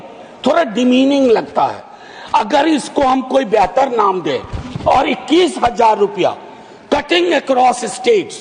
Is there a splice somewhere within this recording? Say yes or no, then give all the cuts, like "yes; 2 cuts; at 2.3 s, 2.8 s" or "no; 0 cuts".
no; 0 cuts